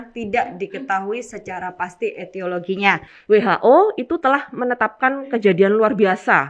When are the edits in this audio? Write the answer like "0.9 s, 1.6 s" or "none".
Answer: 3.1 s